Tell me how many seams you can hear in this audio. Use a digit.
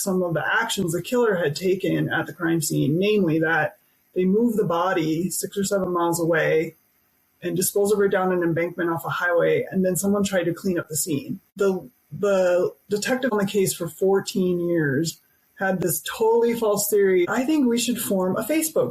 3